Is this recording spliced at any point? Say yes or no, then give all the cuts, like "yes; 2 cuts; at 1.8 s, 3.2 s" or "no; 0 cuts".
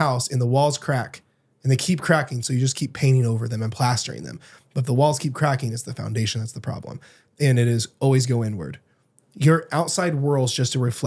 no; 0 cuts